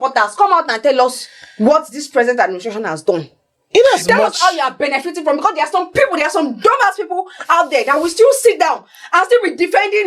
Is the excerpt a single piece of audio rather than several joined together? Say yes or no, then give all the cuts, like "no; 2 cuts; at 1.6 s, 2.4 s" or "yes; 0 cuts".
yes; 0 cuts